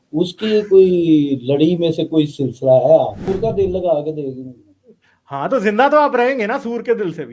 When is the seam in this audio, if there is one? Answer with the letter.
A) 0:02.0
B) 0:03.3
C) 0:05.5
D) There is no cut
B